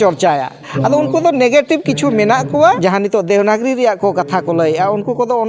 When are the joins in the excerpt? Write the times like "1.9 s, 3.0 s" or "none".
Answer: 2.8 s